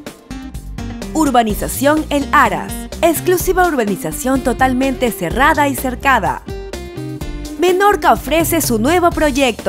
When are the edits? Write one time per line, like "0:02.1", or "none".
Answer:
none